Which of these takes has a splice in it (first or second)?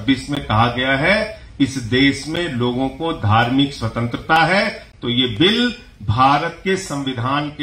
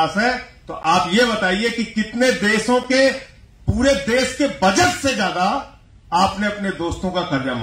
first